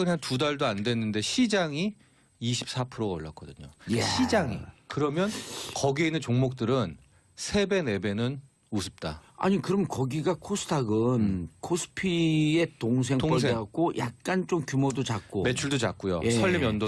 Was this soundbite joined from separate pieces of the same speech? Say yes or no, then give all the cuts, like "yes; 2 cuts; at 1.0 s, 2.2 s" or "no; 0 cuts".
no; 0 cuts